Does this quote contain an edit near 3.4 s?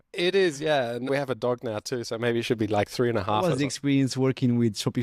yes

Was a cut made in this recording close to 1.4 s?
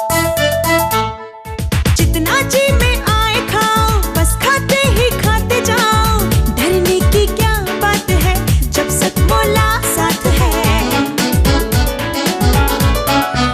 no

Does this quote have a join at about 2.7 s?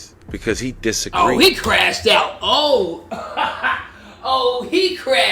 no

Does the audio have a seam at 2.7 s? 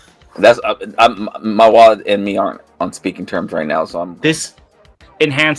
no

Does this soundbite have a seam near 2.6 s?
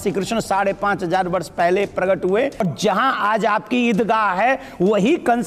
yes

